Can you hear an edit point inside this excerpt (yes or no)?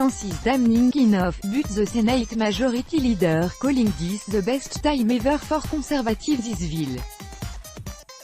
yes